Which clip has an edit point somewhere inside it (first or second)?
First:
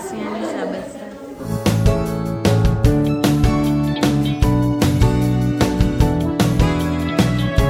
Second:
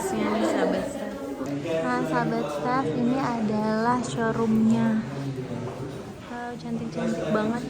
second